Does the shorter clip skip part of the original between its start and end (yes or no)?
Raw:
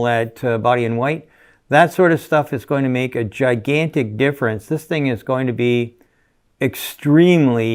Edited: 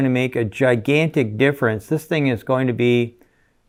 no